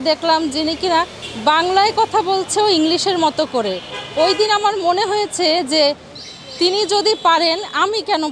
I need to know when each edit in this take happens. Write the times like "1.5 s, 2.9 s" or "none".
none